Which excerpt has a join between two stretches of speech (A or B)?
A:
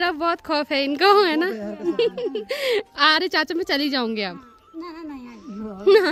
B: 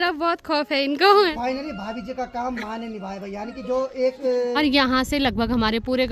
B